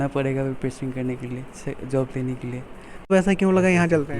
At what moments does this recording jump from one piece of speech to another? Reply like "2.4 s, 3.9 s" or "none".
3.1 s